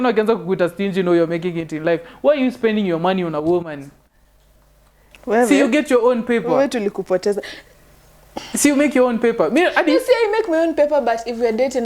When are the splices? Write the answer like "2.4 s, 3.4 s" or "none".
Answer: none